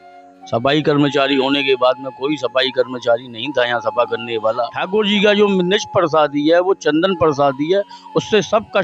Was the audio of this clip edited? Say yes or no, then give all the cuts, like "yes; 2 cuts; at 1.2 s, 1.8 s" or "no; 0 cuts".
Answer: yes; 1 cut; at 4.8 s